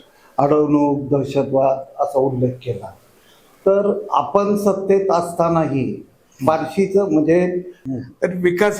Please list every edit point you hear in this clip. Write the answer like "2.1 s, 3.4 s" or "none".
7.7 s